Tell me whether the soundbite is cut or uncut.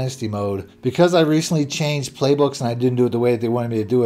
uncut